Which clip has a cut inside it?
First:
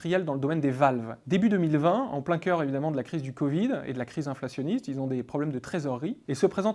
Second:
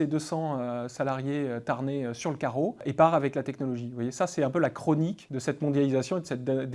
first; 1 cut; at 1.2 s

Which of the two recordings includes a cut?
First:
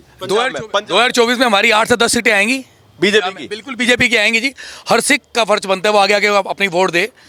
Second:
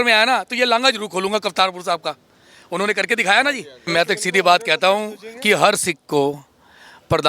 second; 1 cut; at 3.8 s

